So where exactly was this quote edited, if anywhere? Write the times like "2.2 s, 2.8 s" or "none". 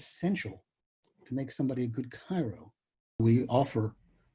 3.2 s